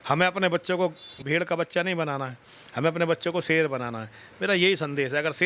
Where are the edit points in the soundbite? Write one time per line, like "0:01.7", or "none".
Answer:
none